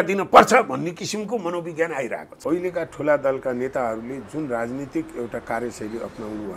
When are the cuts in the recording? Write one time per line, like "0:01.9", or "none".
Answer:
0:02.3